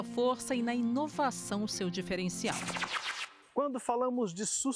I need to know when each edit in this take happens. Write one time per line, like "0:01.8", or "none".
0:03.0